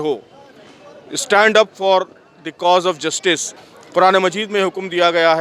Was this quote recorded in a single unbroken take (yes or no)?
no